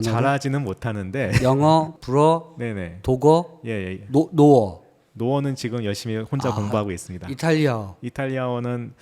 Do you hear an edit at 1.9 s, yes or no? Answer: yes